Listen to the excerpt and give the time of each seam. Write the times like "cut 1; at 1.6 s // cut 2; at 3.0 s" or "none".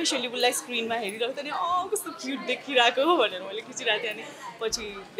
none

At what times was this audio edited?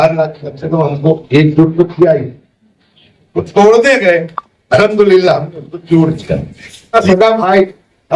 cut 1; at 6.9 s

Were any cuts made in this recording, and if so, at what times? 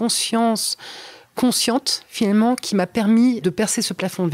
cut 1; at 3.4 s

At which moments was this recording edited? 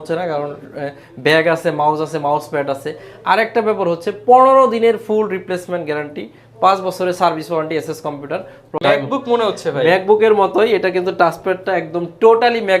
cut 1; at 8.8 s

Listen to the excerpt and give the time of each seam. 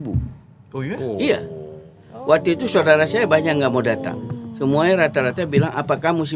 none

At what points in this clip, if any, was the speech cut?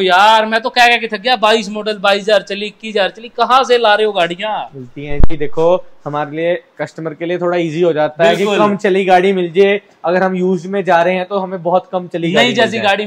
none

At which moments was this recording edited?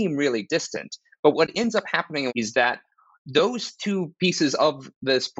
cut 1; at 2.3 s

